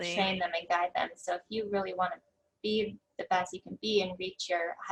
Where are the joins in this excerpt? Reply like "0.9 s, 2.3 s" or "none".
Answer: none